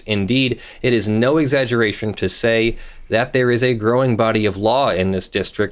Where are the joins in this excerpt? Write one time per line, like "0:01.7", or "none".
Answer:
none